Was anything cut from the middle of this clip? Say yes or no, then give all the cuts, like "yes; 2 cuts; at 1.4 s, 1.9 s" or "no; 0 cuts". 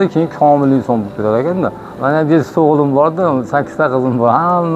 yes; 1 cut; at 1.9 s